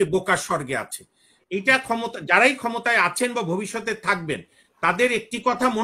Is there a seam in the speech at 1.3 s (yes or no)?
yes